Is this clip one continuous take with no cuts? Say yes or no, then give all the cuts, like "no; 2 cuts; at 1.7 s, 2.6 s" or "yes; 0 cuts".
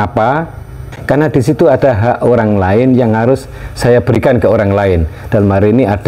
no; 1 cut; at 0.9 s